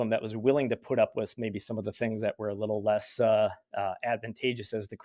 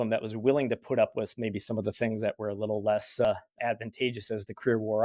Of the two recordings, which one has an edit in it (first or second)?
second